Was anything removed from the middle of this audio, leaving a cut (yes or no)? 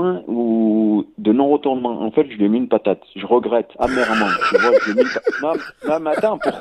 no